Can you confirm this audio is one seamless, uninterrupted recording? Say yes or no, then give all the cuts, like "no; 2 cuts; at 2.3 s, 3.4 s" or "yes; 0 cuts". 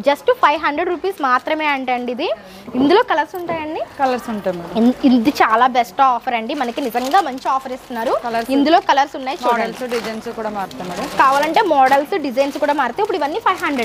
yes; 0 cuts